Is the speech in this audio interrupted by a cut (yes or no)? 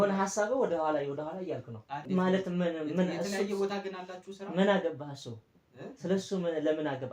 yes